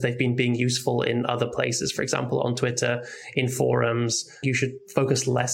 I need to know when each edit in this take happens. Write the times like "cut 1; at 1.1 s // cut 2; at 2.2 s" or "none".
cut 1; at 4.4 s